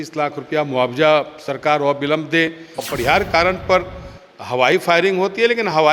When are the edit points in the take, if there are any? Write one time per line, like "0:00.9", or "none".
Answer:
0:02.8